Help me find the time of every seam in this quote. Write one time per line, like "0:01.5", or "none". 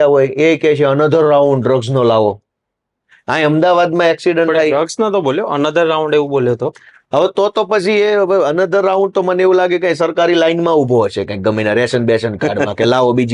none